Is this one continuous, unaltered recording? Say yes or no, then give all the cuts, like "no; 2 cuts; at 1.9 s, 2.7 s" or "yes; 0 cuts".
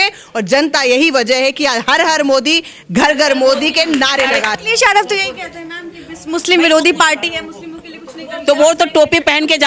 no; 1 cut; at 4.5 s